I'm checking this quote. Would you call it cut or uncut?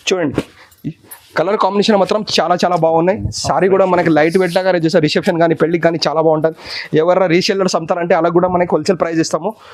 uncut